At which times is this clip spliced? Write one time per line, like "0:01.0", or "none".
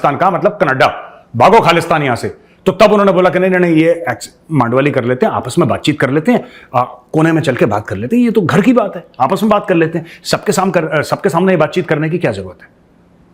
none